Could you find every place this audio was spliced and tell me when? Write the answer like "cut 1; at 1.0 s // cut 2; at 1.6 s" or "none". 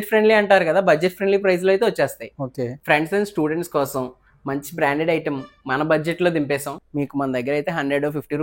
cut 1; at 2.7 s // cut 2; at 6.8 s